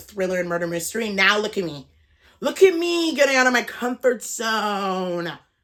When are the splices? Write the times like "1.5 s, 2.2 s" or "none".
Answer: none